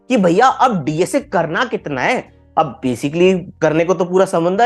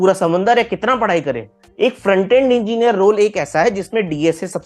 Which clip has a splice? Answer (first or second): second